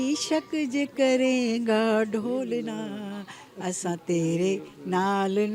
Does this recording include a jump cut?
no; 0 cuts

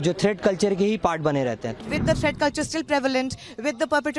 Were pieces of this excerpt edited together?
yes; 1 cut; at 1.8 s

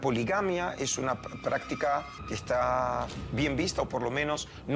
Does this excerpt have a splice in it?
no; 0 cuts

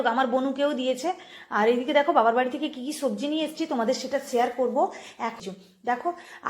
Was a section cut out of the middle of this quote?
yes; 1 cut; at 5.4 s

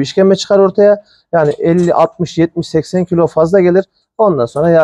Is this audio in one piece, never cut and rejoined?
yes; 0 cuts

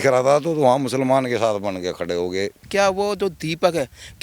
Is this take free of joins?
no; 1 cut; at 2.7 s

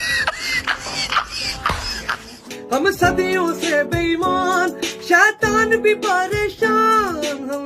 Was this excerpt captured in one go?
no; 1 cut; at 2.4 s

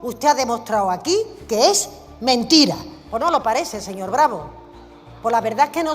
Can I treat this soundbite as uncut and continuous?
no; 1 cut; at 2.9 s

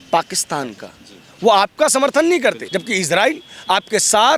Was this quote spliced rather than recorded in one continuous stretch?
yes; 1 cut; at 2.7 s

